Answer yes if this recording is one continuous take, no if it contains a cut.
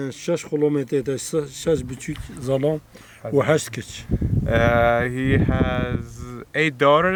yes